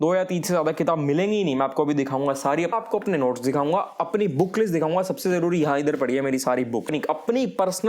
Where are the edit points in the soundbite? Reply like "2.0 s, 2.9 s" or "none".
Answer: 2.7 s, 6.9 s